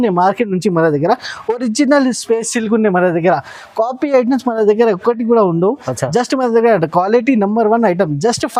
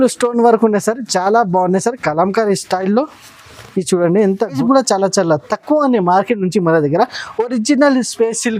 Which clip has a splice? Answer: second; 1 cut; at 4.6 s

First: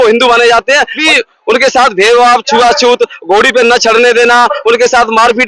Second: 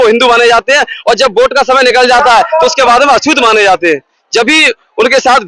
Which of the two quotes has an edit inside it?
first; 1 cut; at 1.0 s

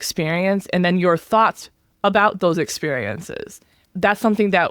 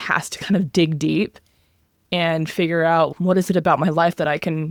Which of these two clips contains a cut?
first; 1 cut; at 3.8 s

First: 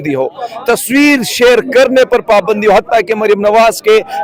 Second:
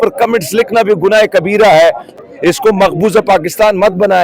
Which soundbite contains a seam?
second; 1 cut; at 2.1 s

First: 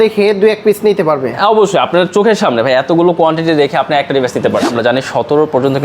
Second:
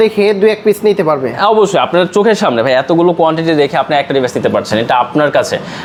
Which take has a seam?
first; 1 cut; at 4.7 s

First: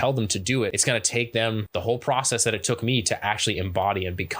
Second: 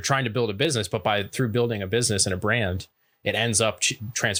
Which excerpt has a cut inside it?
first; 2 cuts; at 0.8 s, 1.6 s

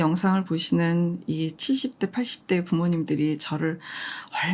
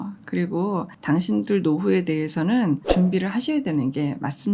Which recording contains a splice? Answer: second; 1 cut; at 0.9 s

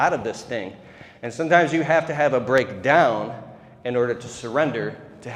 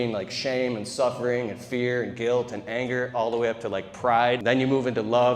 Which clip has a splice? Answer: second; 1 cut; at 4.4 s

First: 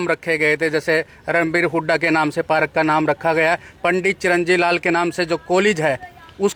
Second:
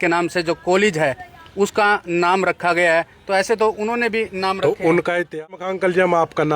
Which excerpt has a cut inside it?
second; 1 cut; at 5.1 s

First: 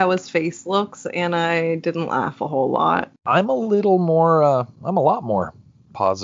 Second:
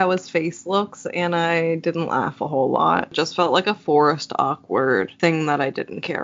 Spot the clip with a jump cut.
second; 1 cut; at 3.1 s

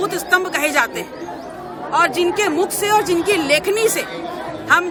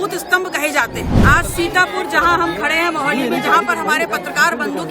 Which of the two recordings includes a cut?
second; 1 cut; at 1.1 s

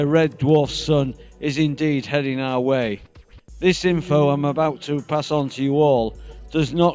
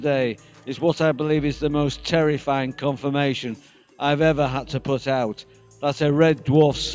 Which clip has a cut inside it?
first; 1 cut; at 4.4 s

